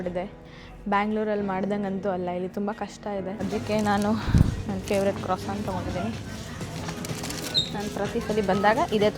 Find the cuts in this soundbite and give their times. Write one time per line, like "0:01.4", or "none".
0:03.4